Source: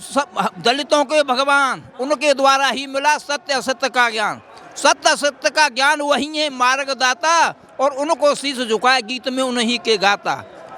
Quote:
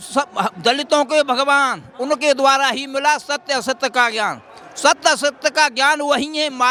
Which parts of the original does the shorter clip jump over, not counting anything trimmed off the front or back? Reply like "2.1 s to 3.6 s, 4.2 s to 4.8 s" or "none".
none

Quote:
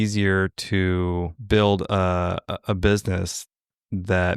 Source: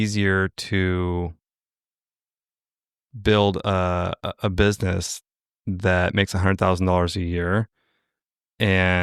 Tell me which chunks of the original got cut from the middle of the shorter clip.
1.4 s to 3.1 s

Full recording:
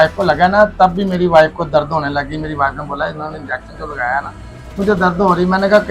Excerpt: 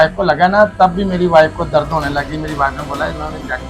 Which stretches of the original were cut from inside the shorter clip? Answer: none

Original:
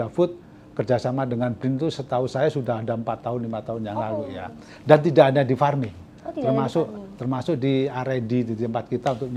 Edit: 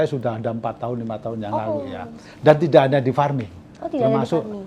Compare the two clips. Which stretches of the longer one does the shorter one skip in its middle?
none

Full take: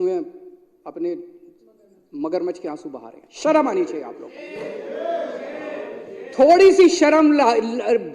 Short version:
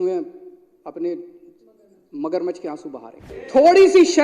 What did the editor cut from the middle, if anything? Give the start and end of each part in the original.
3.2 s to 6.1 s

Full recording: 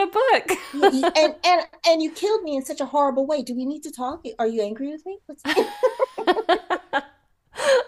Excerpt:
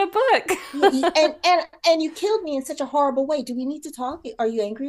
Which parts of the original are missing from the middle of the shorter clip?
none

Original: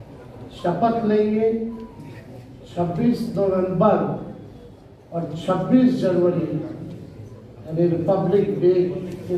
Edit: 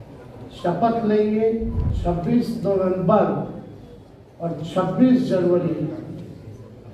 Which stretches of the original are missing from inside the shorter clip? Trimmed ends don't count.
1.8 s to 2.6 s

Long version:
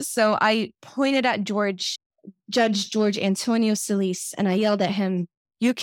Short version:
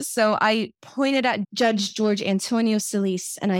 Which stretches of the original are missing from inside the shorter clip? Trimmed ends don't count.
1.4 s to 2.4 s

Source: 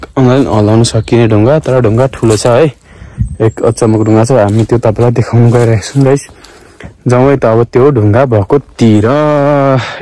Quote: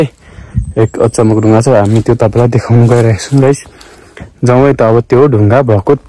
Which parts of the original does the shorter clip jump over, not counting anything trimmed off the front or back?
none

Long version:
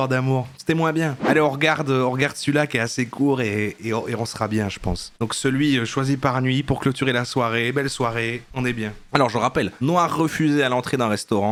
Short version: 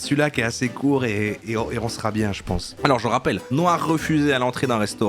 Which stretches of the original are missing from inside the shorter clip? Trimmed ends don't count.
5.1 s to 9.0 s

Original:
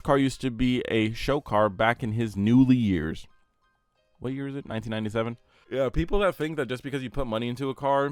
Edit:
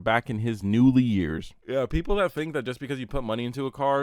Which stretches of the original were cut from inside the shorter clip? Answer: 3.3 s to 5.6 s

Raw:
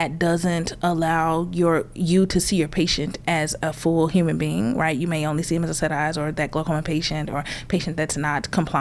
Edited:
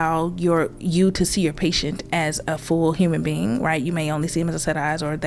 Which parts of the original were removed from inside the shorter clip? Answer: none

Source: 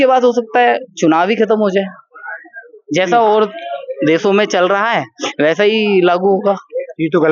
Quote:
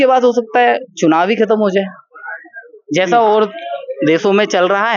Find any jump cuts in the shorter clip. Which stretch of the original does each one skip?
none

